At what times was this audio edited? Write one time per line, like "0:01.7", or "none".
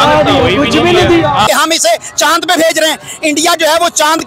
0:01.5

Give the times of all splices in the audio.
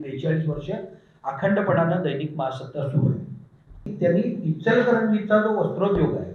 0:03.9

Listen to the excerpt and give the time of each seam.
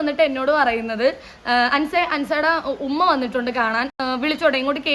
none

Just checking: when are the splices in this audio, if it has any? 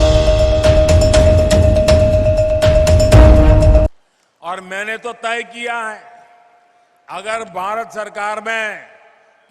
0:03.8

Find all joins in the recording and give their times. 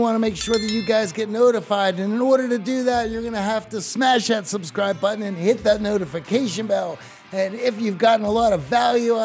none

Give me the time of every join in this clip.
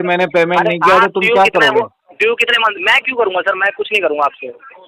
none

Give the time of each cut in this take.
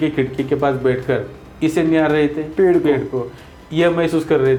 none

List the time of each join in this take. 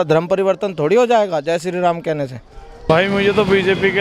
0:02.7

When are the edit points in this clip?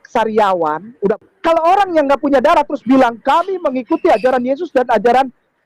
0:01.1

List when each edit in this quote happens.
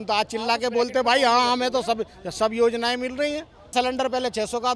0:03.7

